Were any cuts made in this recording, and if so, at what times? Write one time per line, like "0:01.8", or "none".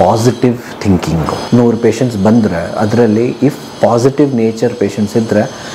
0:01.4